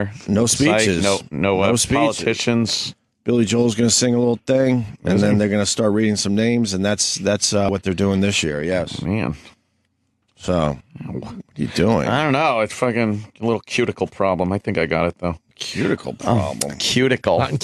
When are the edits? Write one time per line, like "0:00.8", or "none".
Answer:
none